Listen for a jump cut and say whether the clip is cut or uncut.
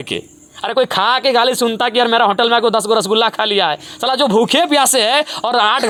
uncut